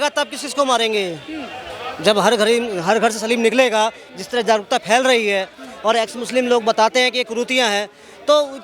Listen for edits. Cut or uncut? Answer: uncut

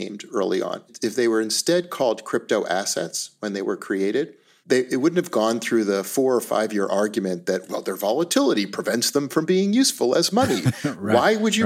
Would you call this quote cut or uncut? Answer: cut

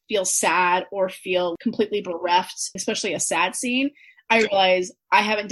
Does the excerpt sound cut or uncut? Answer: cut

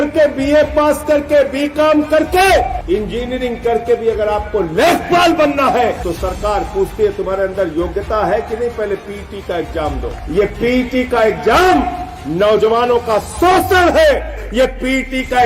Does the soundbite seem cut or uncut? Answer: cut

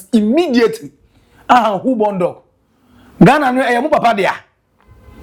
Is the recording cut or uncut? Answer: uncut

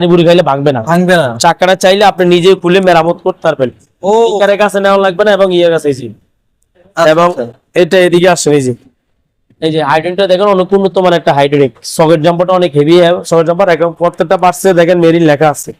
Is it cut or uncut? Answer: uncut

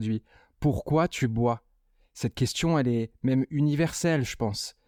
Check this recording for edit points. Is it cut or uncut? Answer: uncut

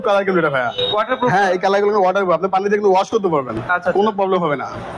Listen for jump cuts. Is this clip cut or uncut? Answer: uncut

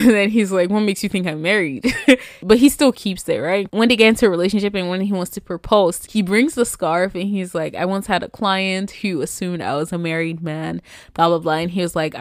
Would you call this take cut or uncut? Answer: cut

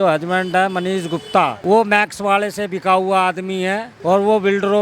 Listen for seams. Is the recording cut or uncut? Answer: cut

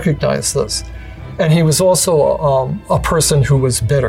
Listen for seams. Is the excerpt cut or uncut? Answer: cut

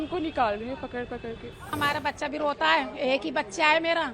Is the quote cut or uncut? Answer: cut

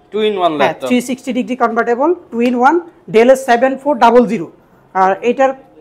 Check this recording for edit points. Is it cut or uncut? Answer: uncut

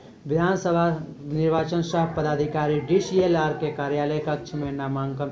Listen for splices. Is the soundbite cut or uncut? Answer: uncut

